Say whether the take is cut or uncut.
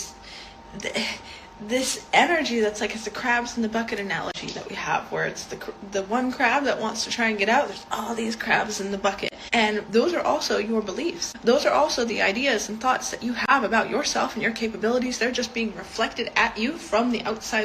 cut